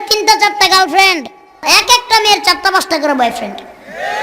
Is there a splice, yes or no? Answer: yes